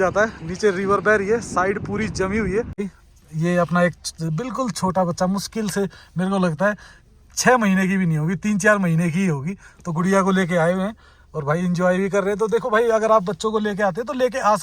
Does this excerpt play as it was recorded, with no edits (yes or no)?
no